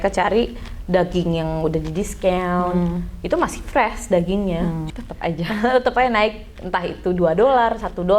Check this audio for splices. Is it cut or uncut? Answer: cut